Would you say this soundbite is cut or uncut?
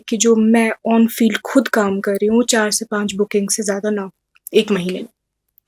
uncut